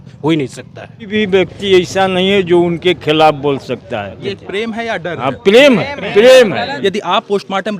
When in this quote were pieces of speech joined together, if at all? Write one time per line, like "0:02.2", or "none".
0:01.1
0:04.3
0:06.7

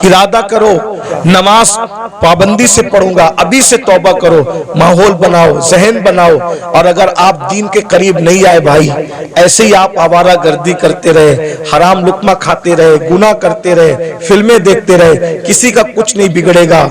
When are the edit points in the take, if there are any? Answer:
0:01.0

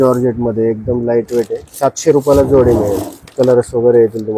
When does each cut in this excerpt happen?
0:03.3

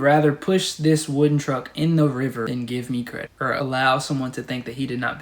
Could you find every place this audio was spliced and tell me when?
0:02.5
0:03.5

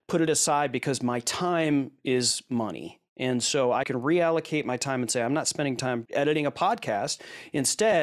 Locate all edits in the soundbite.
0:03.9
0:06.1

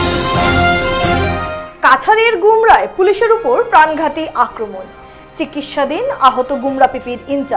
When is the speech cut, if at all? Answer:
0:01.2

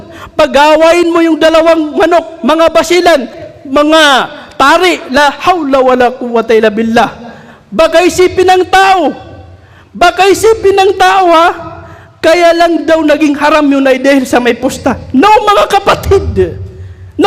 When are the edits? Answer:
none

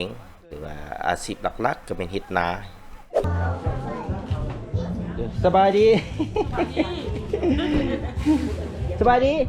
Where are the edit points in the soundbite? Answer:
0:03.2

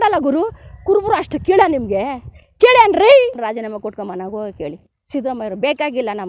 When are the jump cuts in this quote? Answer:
0:03.4

